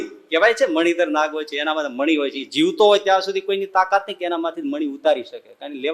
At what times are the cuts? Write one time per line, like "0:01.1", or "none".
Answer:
none